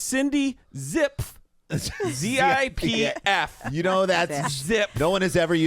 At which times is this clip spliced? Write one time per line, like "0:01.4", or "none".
none